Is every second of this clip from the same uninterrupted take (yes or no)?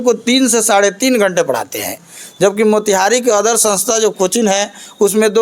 yes